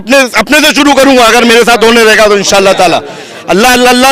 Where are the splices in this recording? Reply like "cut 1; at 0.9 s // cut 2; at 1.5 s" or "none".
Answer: none